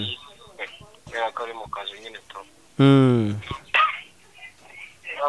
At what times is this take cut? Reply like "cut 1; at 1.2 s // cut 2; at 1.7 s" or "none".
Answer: cut 1; at 3.7 s